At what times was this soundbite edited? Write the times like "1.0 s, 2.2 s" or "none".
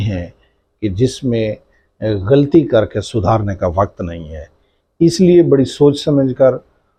none